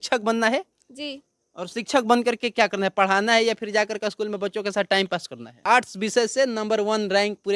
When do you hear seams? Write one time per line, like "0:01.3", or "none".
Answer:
0:05.6

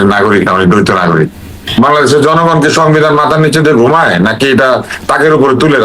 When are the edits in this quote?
0:01.5

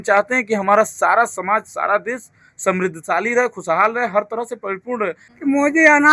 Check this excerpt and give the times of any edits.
0:05.2

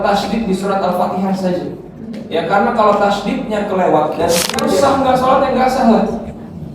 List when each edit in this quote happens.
0:04.5

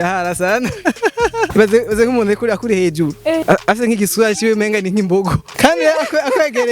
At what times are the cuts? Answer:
0:01.5
0:03.4
0:05.5

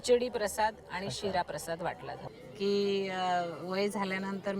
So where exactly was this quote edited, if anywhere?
0:02.2

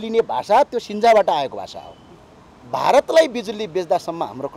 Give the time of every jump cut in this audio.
0:02.6

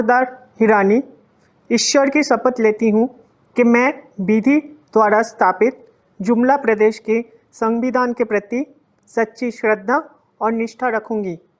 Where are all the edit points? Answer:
none

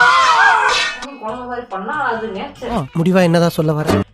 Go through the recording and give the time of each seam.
0:01.0

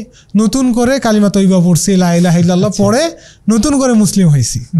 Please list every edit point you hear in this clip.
none

